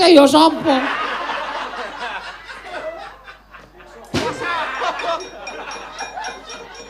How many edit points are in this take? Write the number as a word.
one